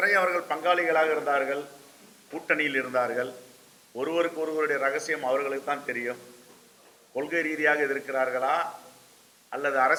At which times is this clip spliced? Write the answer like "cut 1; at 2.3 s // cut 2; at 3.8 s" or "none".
none